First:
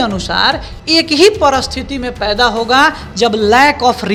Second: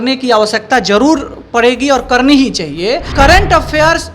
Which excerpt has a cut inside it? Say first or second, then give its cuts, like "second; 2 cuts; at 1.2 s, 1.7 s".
second; 1 cut; at 3.1 s